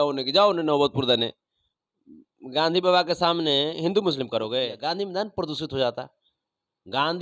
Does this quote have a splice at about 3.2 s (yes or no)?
no